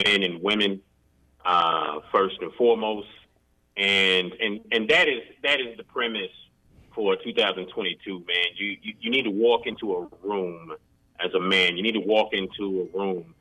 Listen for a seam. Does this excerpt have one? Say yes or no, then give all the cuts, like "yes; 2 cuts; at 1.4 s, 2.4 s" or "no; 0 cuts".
no; 0 cuts